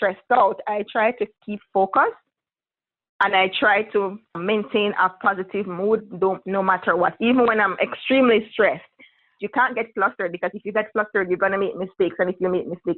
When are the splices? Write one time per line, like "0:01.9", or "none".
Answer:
0:04.4
0:09.3